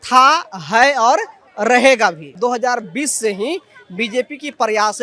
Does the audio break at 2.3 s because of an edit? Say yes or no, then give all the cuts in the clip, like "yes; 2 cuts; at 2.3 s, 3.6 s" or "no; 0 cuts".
yes; 1 cut; at 2.3 s